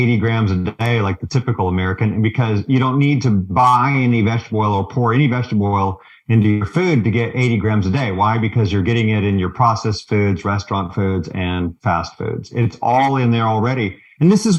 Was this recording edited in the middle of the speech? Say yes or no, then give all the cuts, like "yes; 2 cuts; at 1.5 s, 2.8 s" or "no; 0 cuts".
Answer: no; 0 cuts